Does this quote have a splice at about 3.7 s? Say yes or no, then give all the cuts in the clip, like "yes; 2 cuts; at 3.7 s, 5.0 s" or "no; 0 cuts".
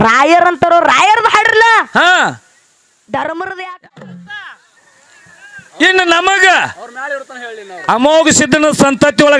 yes; 1 cut; at 3.7 s